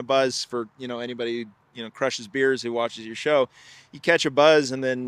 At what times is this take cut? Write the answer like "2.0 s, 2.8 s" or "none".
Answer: none